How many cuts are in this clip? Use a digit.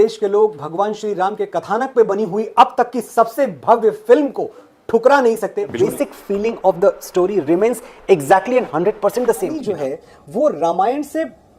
2